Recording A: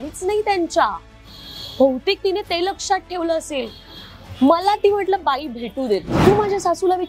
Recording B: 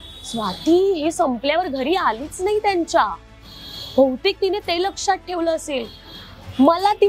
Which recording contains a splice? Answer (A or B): A